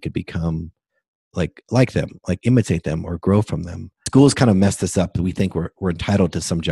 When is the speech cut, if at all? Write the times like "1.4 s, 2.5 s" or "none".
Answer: 4.0 s